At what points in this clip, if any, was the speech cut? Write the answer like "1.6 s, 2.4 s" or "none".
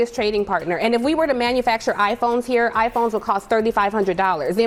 none